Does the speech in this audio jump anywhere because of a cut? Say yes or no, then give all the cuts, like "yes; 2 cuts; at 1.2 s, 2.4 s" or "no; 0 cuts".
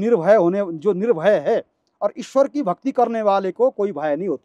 no; 0 cuts